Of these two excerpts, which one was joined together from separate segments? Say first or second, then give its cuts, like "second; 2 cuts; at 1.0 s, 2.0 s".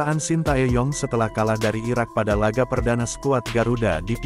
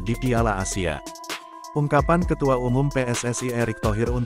second; 1 cut; at 1.6 s